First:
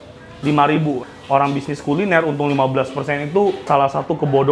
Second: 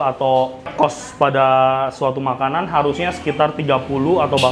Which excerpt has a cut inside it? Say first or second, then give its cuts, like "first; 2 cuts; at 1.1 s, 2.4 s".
first; 1 cut; at 1.1 s